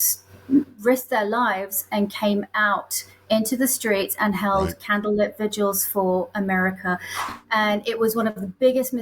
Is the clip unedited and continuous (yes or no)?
no